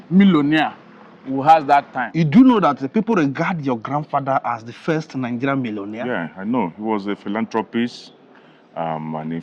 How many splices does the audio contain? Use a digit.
2